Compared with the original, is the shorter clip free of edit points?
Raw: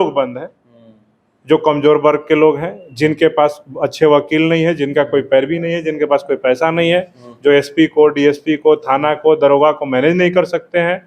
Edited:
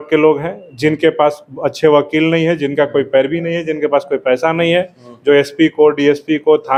yes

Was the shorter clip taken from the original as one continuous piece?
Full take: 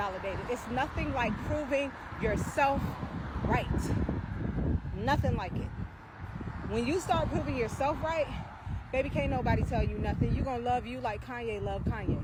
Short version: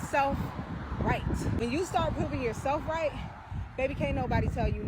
no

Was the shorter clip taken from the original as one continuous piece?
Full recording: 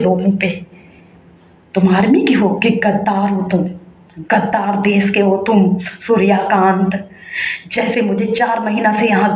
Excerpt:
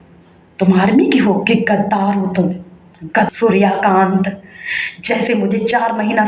no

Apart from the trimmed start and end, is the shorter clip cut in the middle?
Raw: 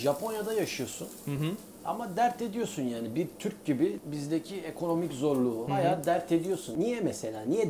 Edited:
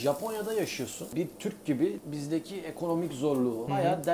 yes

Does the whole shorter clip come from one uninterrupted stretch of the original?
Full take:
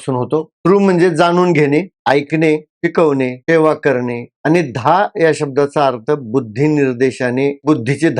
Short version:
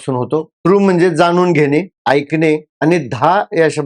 no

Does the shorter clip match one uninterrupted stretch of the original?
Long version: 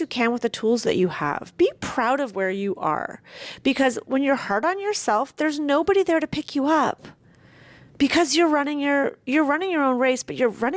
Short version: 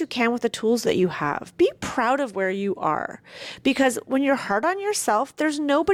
yes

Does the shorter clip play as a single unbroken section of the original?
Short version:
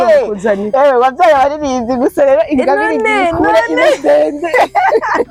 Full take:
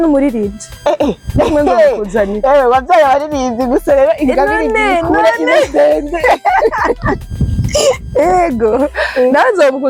yes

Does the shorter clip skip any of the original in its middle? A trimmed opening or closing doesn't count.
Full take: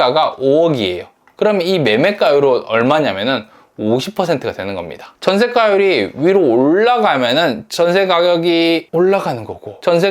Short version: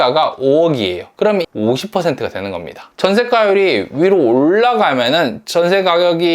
yes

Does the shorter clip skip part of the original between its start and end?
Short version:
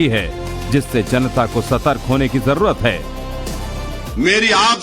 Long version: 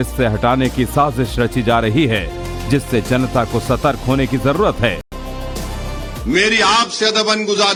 yes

